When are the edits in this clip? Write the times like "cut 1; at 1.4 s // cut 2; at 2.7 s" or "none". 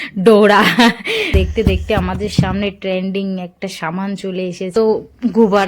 cut 1; at 1.4 s // cut 2; at 4.7 s